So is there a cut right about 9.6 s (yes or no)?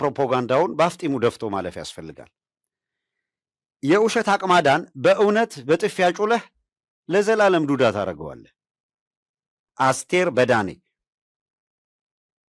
yes